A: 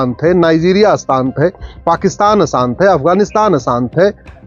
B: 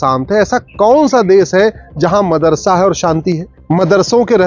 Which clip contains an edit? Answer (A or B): B